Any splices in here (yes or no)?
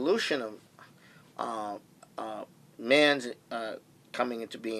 no